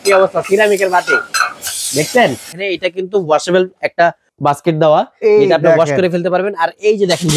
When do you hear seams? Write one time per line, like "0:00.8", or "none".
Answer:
0:02.5
0:04.3